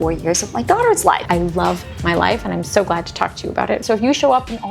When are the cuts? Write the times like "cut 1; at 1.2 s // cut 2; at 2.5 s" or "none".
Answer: cut 1; at 1.2 s // cut 2; at 3.8 s

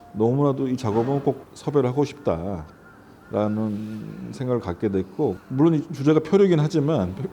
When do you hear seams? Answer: cut 1; at 5.4 s

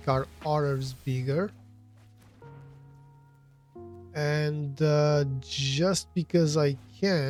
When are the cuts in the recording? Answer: none

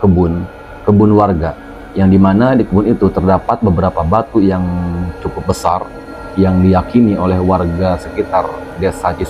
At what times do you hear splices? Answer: none

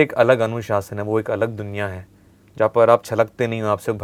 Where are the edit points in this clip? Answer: none

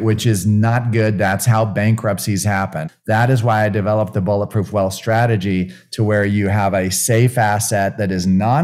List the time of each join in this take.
cut 1; at 2.9 s

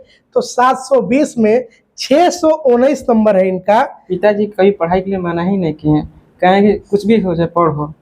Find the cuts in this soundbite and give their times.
cut 1; at 4.1 s

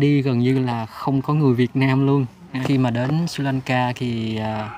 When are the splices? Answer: cut 1; at 2.6 s

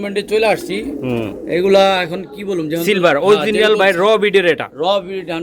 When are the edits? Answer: none

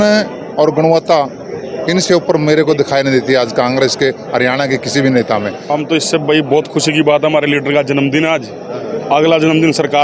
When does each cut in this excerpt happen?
cut 1; at 5.6 s

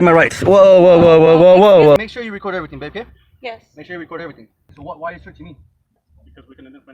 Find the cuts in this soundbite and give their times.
cut 1; at 2.0 s // cut 2; at 4.7 s

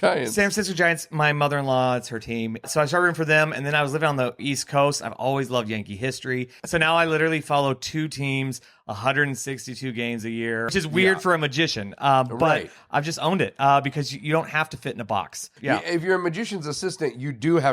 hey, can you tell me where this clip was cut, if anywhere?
cut 1; at 2.7 s // cut 2; at 4.4 s // cut 3; at 6.6 s // cut 4; at 10.7 s // cut 5; at 15.6 s

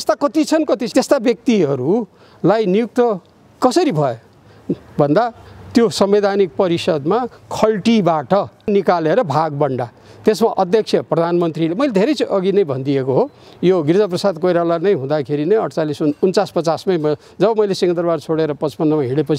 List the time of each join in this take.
none

